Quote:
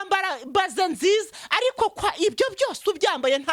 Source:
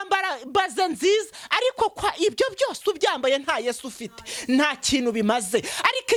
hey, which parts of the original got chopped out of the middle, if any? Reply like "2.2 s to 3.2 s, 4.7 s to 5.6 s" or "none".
none